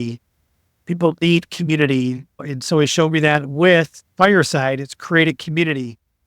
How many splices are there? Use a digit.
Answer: 1